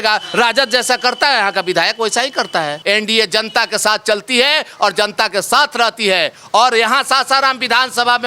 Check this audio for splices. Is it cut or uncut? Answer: cut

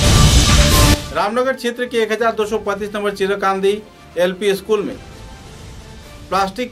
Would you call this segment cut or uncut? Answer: cut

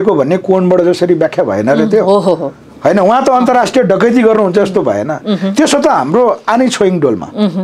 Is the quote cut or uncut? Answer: uncut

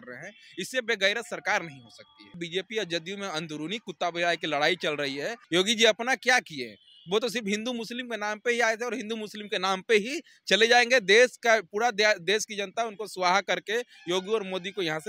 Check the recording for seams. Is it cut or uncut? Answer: cut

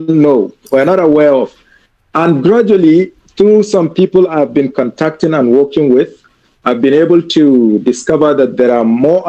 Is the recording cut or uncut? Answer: uncut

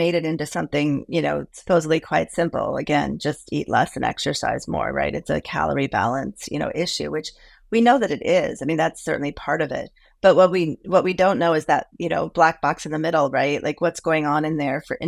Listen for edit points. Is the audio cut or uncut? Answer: uncut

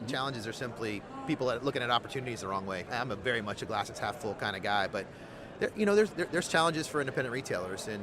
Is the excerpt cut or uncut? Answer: cut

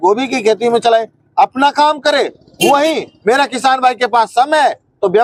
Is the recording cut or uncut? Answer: uncut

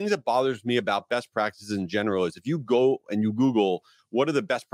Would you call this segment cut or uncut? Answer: uncut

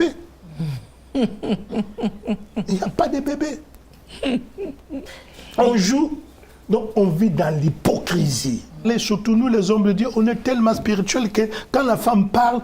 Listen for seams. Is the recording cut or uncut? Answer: cut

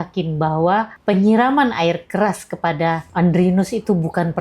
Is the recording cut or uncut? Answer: cut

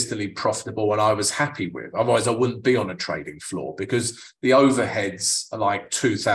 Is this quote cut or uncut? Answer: uncut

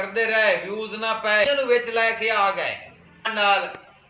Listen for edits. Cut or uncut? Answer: cut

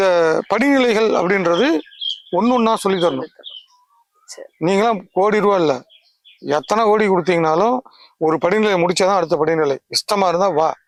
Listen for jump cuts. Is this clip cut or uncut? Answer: uncut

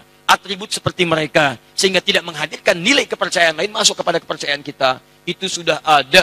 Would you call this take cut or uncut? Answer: uncut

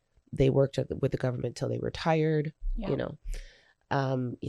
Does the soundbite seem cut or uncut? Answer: uncut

